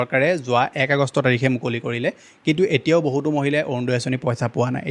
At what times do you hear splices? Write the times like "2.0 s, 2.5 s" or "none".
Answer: none

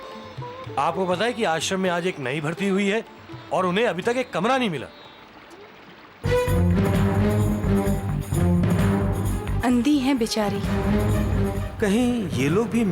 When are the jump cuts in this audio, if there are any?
6.2 s

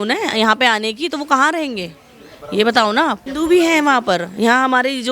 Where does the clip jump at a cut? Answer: 3.3 s

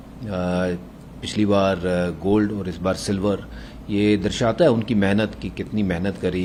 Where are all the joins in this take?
none

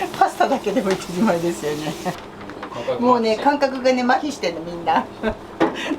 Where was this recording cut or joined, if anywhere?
none

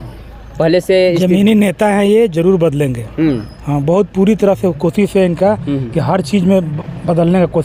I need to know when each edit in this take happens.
none

